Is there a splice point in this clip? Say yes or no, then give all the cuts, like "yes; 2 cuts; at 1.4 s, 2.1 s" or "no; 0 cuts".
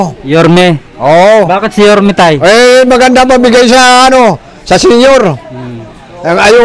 no; 0 cuts